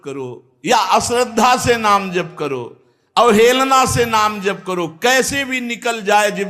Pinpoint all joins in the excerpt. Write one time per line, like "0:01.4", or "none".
none